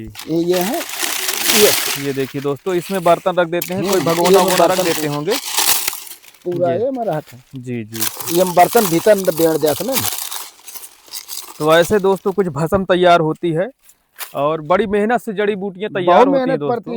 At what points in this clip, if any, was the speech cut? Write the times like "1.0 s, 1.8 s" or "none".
none